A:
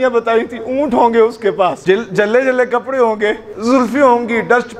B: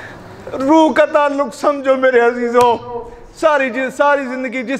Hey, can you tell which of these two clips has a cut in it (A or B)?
A